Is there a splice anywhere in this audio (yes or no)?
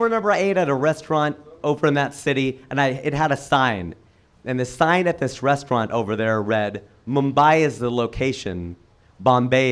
no